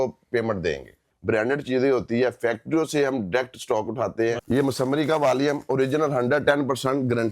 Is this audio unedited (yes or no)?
no